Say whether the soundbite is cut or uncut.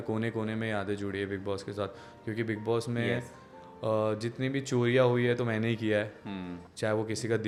uncut